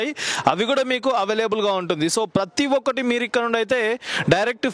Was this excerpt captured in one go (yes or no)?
yes